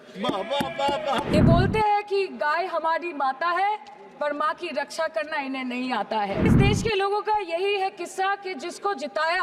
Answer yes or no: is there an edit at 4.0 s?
no